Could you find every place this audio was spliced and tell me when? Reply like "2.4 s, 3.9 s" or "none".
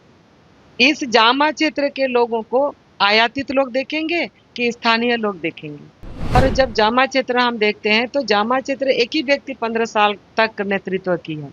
6.4 s